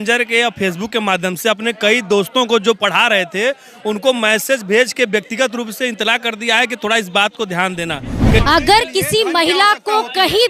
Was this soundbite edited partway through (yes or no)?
yes